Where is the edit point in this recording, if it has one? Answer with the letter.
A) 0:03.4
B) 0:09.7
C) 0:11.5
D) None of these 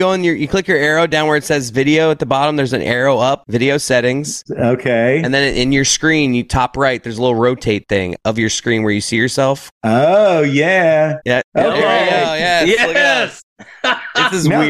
B